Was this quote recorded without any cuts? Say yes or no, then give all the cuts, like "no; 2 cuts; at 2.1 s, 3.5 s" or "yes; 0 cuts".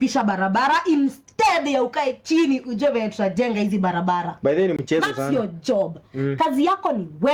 yes; 0 cuts